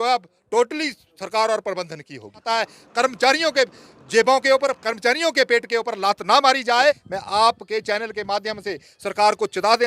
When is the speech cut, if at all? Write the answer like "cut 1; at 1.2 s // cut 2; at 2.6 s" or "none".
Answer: cut 1; at 2.4 s // cut 2; at 7.1 s